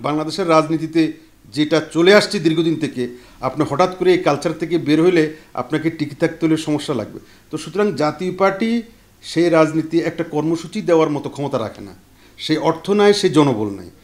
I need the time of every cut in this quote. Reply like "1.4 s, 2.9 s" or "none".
none